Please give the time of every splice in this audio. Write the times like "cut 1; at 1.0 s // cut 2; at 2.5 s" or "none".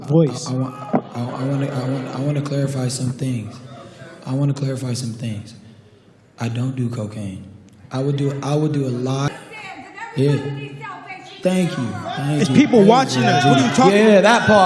cut 1; at 9.3 s

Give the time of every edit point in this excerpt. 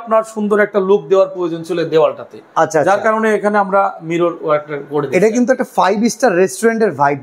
none

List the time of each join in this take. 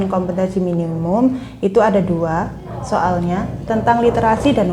none

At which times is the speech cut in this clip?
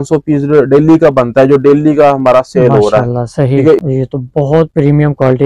cut 1; at 3.8 s

